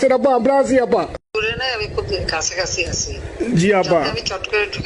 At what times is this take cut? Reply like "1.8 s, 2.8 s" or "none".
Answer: 1.3 s, 3.3 s